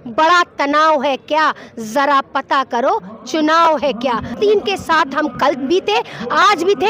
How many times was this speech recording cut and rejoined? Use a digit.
1